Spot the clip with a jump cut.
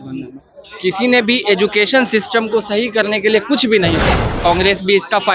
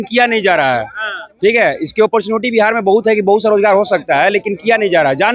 first; 1 cut; at 4.2 s

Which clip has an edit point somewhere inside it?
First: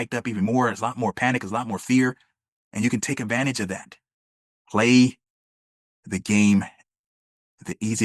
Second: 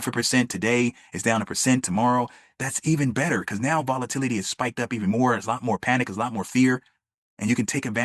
first; 1 cut; at 4.4 s

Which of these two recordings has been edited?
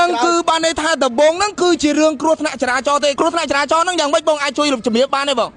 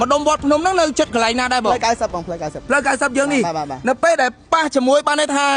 first; 1 cut; at 3.1 s

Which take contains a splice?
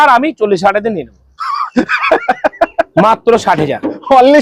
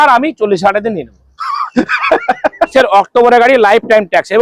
second; 1 cut; at 2.7 s

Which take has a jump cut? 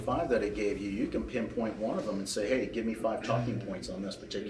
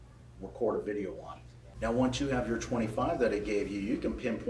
second; 1 cut; at 1.6 s

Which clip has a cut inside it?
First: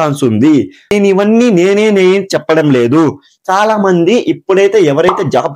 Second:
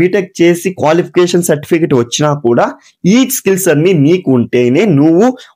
first; 1 cut; at 0.9 s

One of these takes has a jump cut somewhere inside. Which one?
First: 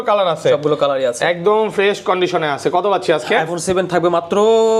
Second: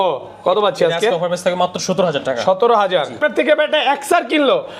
second; 1 cut; at 3.2 s

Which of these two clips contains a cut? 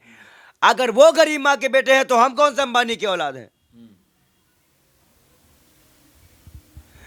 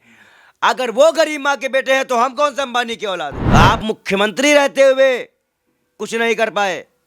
second; 1 cut; at 3.4 s

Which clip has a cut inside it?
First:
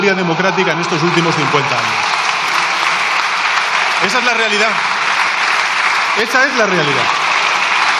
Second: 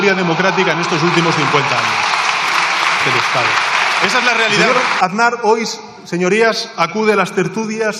second; 1 cut; at 4.7 s

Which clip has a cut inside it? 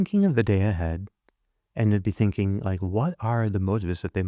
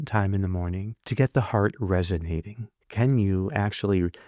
second; 2 cuts; at 0.9 s, 2.8 s

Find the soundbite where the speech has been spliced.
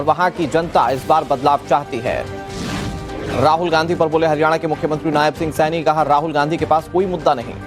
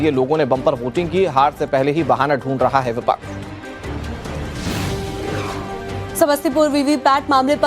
second; 1 cut; at 1.0 s

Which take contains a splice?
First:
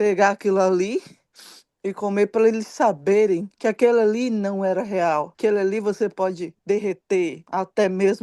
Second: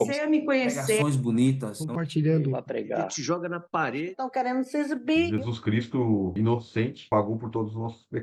first; 4 cuts; at 3.5 s, 5.3 s, 6.5 s, 7.4 s

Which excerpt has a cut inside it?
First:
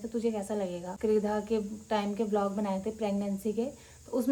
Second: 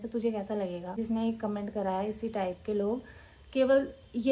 second; 1 cut; at 1.0 s

